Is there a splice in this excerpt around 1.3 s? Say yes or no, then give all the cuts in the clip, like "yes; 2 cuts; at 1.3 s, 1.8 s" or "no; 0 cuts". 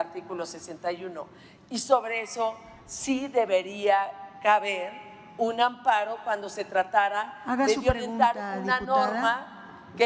no; 0 cuts